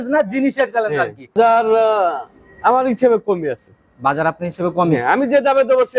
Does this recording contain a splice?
yes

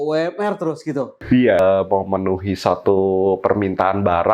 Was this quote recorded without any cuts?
no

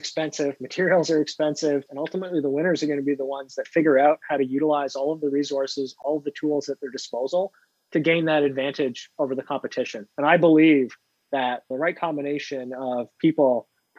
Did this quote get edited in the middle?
yes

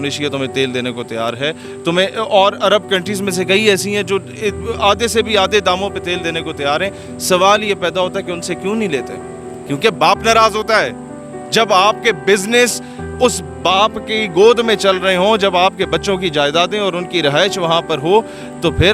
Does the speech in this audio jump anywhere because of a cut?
no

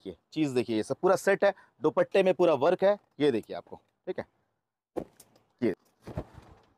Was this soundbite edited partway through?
yes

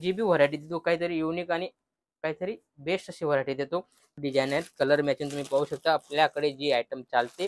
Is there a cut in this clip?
yes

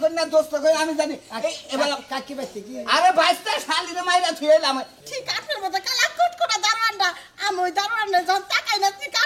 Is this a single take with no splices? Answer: no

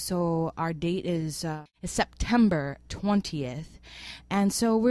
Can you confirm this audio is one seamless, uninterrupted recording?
no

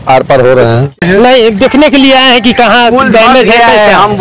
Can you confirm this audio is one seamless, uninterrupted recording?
no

